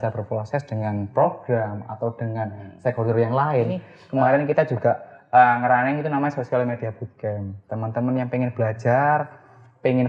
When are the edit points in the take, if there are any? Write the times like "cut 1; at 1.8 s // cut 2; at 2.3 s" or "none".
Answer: cut 1; at 3.9 s